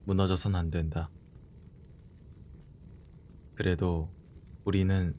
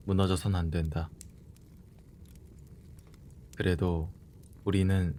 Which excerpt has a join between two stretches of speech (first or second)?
first